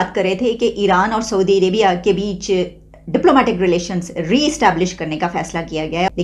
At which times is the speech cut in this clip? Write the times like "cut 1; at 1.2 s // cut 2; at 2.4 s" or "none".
none